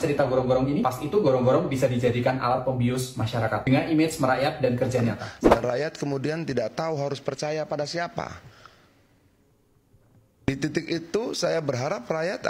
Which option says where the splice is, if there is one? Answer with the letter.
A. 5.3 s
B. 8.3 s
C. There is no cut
A